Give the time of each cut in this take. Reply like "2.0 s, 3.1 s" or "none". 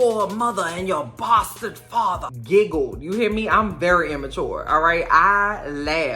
2.3 s